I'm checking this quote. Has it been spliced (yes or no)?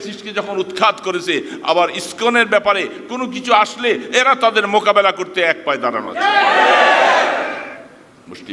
no